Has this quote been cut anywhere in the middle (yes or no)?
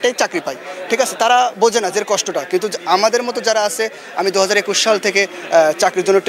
no